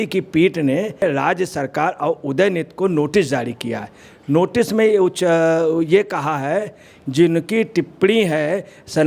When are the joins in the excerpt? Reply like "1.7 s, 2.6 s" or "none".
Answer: 1.0 s, 6.9 s